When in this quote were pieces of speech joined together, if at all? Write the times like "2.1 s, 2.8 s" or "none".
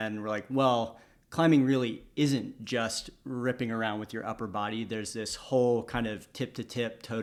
none

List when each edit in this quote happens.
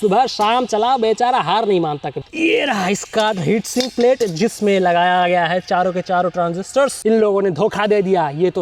2.3 s, 7.0 s

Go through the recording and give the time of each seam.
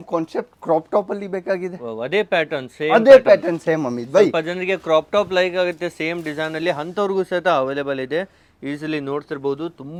none

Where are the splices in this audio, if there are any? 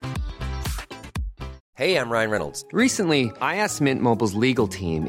1.6 s

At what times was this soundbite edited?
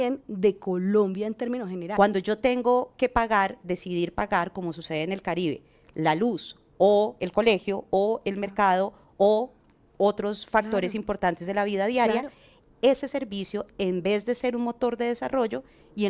1.9 s

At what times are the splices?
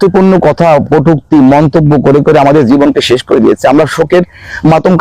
none

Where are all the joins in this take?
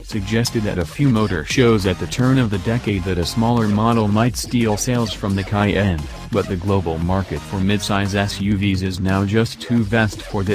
9.6 s

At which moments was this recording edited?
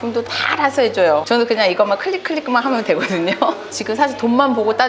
1.2 s, 3.7 s

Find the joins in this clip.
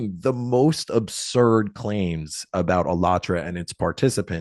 none

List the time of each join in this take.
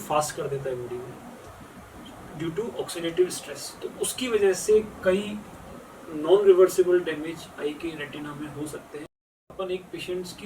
9.2 s

